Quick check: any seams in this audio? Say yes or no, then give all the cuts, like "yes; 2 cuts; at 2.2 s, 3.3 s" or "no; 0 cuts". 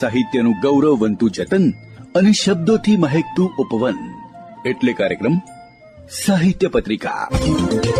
no; 0 cuts